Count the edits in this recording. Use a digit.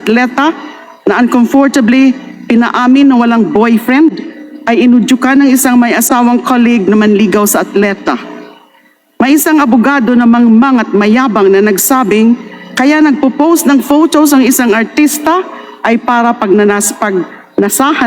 0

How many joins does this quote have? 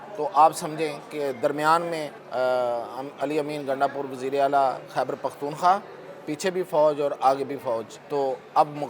2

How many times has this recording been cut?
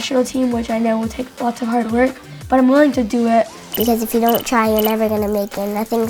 1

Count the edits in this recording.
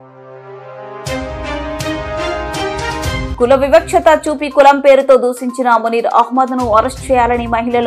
1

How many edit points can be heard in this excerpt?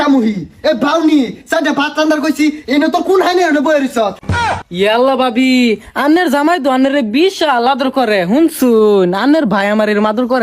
0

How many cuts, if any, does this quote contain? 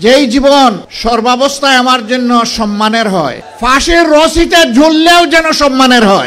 2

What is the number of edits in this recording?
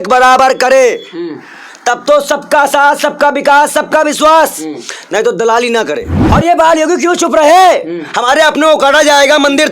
1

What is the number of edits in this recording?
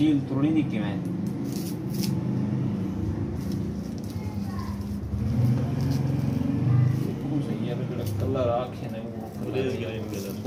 0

